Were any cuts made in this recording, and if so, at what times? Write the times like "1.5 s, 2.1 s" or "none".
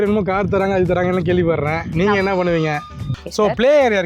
3.1 s